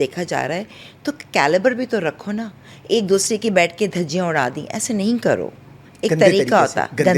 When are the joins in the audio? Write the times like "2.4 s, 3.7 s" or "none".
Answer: none